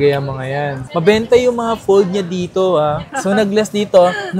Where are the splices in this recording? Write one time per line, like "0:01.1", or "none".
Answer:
0:03.1

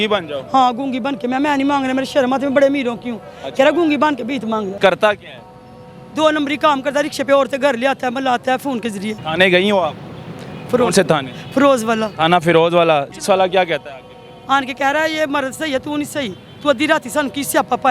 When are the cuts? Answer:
0:04.7
0:09.2
0:13.1

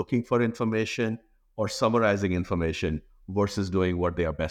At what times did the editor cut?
none

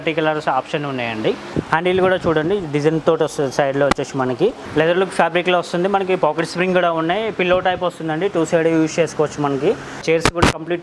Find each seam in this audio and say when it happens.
0:01.4
0:04.6
0:10.0

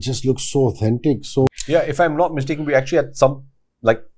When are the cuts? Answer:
0:01.5

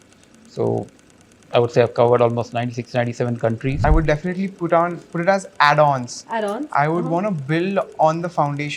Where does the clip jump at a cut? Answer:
0:03.8

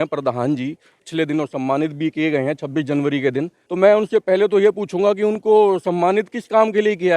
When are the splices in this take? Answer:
0:01.0
0:03.6

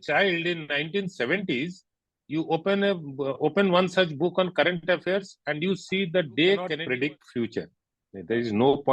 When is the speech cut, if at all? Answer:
0:06.8

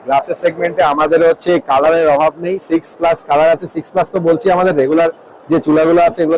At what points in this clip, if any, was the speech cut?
none

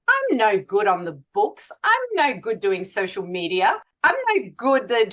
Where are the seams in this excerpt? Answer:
0:03.9

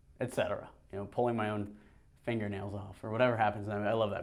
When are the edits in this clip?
none

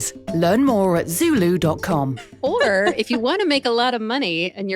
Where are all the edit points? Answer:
0:02.2

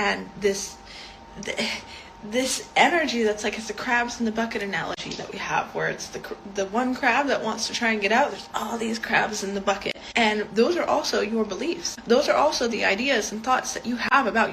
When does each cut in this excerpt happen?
0:10.0
0:11.9

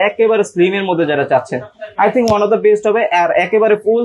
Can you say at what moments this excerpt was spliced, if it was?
none

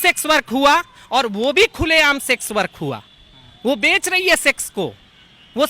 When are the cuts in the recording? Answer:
none

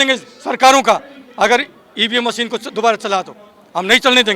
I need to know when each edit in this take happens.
none

